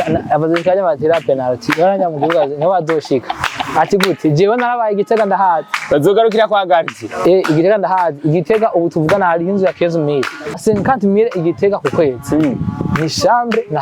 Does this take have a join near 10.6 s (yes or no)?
yes